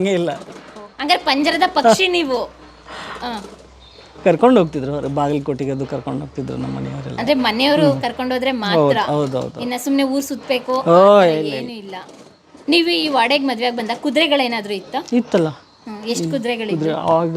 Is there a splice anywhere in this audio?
no; 0 cuts

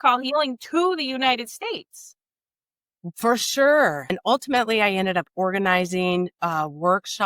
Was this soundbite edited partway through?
yes; 1 cut; at 4.1 s

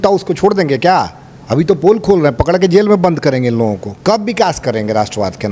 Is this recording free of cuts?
no; 1 cut; at 3.9 s

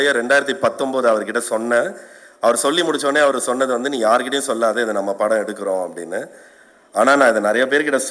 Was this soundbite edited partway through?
no; 0 cuts

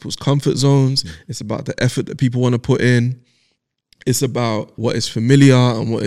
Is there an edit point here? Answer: yes; 1 cut; at 4.7 s

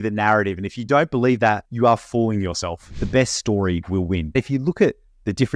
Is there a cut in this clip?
yes; 3 cuts; at 1.7 s, 2.9 s, 4.3 s

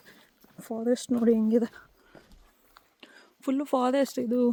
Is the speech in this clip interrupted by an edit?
no; 0 cuts

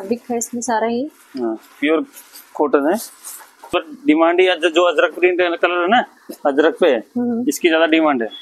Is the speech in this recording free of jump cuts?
no; 1 cut; at 3.8 s

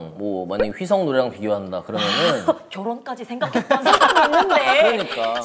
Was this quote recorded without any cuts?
yes; 0 cuts

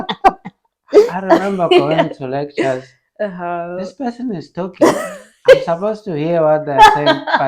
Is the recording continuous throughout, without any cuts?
no; 1 cut; at 1.2 s

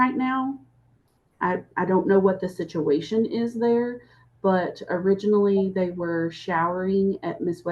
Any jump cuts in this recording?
yes; 1 cut; at 4.2 s

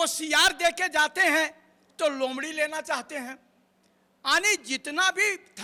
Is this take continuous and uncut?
yes; 0 cuts

